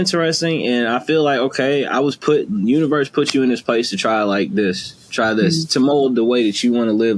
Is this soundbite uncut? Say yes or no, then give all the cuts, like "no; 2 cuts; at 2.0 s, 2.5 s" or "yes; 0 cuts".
yes; 0 cuts